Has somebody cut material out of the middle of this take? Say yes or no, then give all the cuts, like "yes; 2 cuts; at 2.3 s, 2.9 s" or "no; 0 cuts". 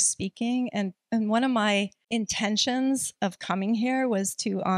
yes; 1 cut; at 2.0 s